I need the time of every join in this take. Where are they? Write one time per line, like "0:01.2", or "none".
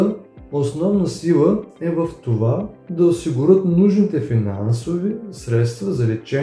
none